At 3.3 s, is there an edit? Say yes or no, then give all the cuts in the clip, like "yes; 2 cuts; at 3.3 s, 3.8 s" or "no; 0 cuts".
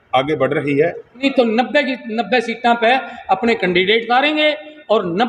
no; 1 cut; at 1.2 s